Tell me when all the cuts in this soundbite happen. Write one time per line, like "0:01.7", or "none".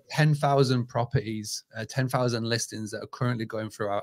none